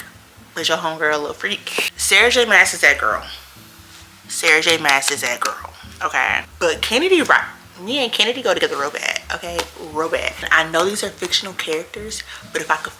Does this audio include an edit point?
yes; 3 cuts; at 2.0 s, 6.5 s, 10.5 s

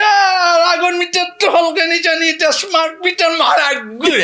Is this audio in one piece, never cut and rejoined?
yes; 0 cuts

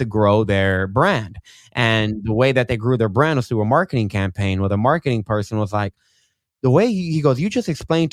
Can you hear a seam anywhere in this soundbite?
no; 0 cuts

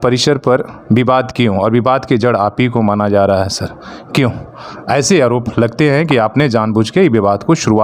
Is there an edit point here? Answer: no; 0 cuts

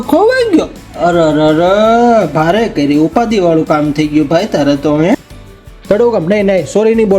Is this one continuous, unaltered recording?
no; 1 cut; at 5.3 s

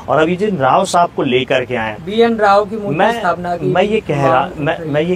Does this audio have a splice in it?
no; 0 cuts

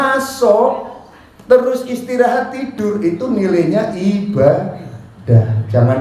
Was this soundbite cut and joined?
no; 0 cuts

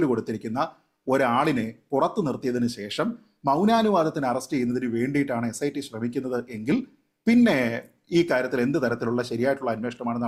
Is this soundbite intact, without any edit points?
yes; 0 cuts

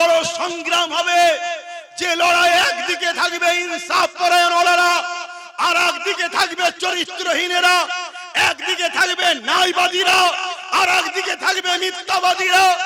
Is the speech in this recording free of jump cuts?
yes; 0 cuts

